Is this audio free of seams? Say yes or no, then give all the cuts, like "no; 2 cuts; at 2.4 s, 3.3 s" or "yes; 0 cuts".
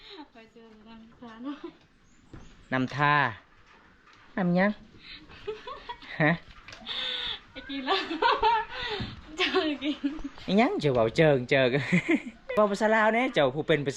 no; 1 cut; at 12.4 s